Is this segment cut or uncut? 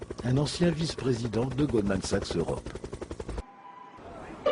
cut